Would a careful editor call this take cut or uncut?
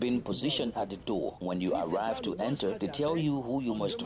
cut